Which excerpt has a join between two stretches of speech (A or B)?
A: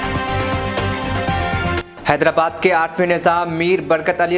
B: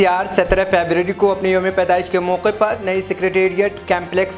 A